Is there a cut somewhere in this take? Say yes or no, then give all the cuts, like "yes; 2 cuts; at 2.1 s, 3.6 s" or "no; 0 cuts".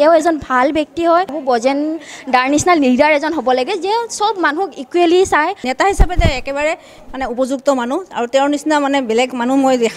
yes; 2 cuts; at 1.4 s, 5.6 s